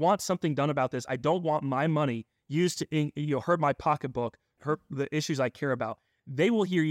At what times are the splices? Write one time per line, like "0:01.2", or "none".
none